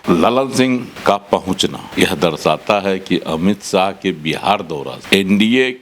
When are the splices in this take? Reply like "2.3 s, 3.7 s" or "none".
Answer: 0.9 s, 1.8 s, 4.9 s